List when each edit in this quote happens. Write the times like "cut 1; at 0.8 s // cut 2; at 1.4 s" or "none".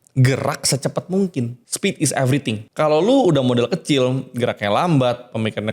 cut 1; at 1.6 s // cut 2; at 2.7 s